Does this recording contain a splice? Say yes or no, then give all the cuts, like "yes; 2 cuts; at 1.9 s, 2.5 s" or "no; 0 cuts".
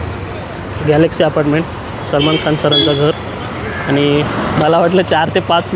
yes; 1 cut; at 4.6 s